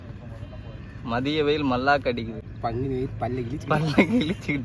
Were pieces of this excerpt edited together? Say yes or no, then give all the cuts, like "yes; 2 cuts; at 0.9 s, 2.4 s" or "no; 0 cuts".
yes; 1 cut; at 2.5 s